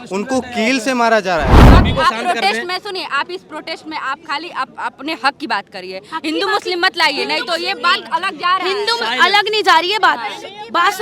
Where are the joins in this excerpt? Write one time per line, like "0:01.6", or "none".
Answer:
0:01.6